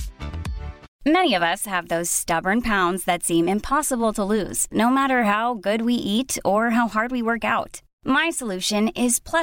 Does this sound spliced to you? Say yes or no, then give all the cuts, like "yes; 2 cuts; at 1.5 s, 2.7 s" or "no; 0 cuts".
yes; 1 cut; at 0.9 s